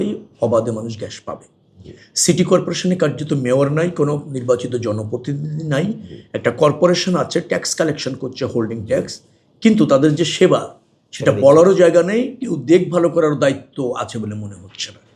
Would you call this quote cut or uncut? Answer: uncut